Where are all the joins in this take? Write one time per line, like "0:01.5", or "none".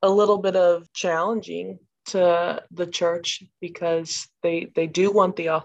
0:00.9